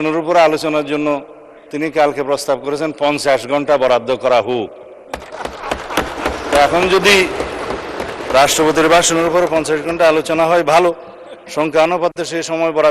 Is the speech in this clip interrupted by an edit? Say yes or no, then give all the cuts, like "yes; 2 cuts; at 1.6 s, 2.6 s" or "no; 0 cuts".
no; 0 cuts